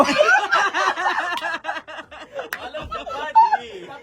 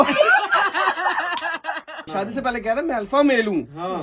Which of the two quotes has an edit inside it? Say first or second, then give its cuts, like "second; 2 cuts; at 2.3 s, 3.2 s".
second; 1 cut; at 2.1 s